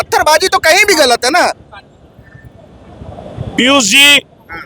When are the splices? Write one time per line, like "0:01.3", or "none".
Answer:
none